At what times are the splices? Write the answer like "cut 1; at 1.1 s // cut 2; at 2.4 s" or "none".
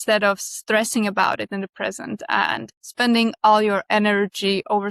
cut 1; at 2.8 s